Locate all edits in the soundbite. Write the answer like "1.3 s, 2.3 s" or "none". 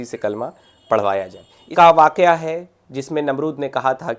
1.6 s